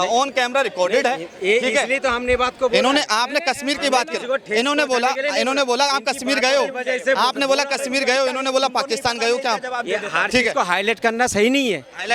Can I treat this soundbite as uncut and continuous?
yes; 0 cuts

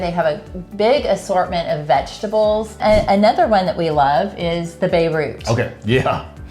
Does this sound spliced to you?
yes; 1 cut; at 2.8 s

